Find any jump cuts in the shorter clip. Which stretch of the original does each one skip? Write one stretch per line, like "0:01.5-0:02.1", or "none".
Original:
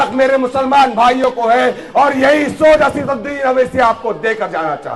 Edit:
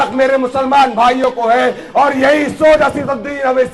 none